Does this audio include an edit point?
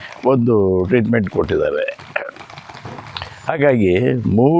no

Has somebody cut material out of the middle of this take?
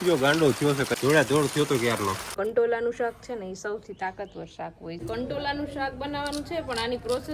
yes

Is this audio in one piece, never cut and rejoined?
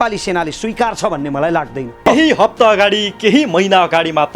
no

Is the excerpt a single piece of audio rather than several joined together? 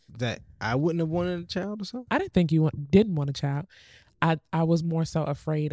yes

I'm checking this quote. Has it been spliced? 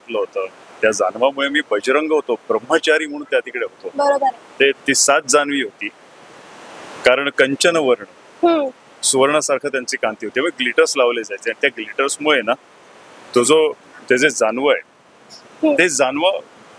no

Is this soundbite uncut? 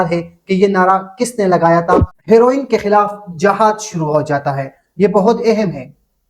no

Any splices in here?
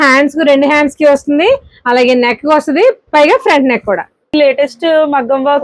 yes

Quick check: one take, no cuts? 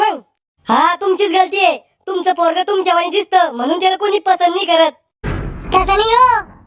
no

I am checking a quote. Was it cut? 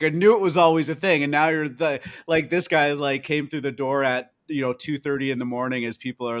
no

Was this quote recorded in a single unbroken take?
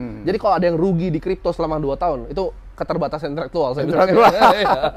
yes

